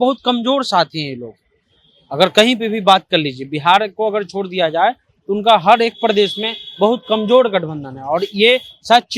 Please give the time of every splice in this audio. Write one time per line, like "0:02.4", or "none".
none